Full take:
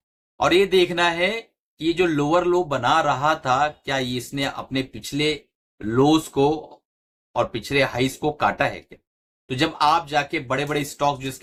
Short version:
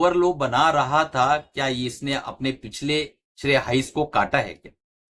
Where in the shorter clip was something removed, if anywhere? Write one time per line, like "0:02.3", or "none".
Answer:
0:03.3